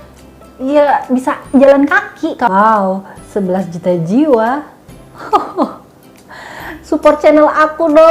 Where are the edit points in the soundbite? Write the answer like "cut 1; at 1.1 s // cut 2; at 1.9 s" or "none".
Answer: cut 1; at 2.5 s